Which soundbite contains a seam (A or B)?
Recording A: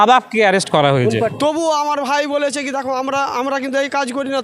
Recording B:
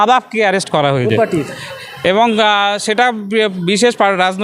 A